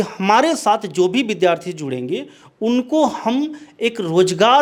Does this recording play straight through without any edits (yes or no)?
yes